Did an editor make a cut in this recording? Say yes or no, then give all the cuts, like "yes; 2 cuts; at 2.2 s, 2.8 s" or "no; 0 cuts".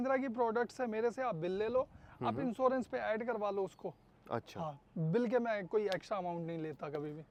no; 0 cuts